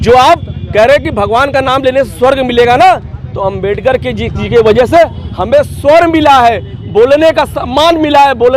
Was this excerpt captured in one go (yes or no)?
yes